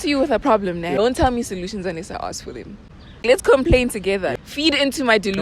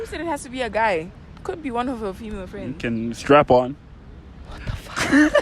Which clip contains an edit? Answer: first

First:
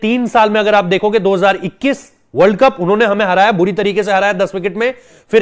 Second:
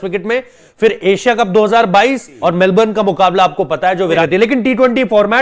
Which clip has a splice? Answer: second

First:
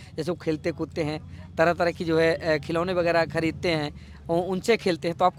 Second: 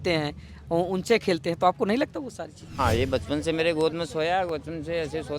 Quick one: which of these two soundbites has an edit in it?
second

